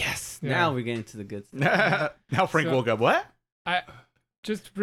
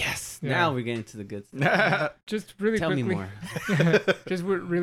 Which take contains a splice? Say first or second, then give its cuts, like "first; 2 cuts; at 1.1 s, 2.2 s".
second; 1 cut; at 2.2 s